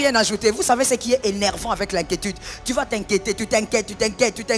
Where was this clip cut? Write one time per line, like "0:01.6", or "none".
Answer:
none

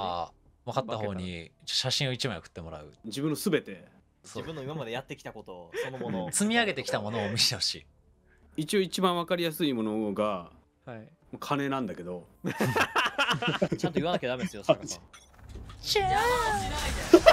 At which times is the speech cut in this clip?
0:03.0
0:04.1
0:08.4
0:13.7
0:14.9

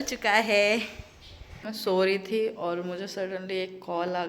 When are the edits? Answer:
0:01.7

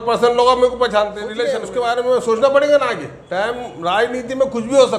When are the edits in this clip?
0:01.6

